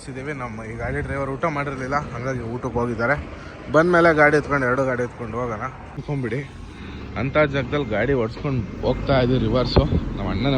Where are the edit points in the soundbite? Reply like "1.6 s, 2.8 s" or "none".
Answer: 6.0 s